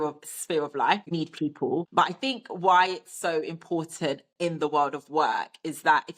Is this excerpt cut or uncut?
cut